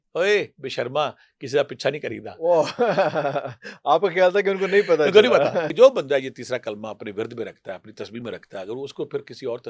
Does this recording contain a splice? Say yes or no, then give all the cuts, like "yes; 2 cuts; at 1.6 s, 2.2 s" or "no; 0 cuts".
yes; 1 cut; at 5.7 s